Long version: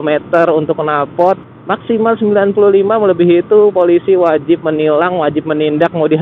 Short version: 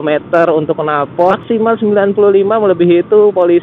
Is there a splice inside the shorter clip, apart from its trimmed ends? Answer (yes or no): yes